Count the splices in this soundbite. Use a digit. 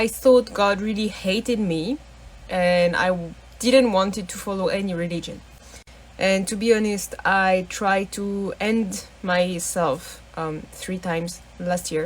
1